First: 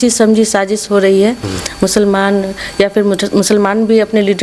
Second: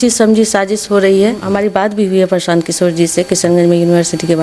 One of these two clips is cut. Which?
second; 1 cut; at 1.4 s

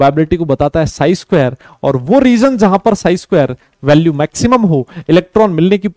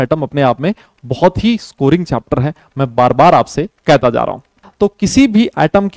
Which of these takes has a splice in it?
second; 1 cut; at 4.6 s

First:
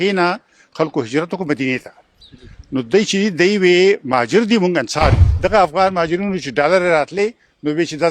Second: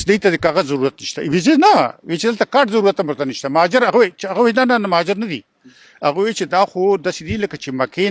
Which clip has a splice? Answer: first; 1 cut; at 5.3 s

